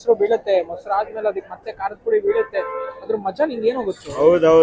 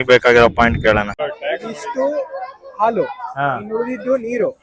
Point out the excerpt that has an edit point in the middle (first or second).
second